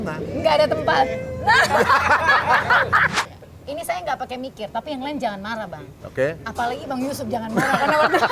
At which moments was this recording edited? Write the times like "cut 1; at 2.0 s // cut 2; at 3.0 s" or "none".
cut 1; at 3.2 s